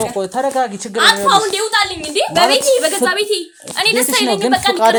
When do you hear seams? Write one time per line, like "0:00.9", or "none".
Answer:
none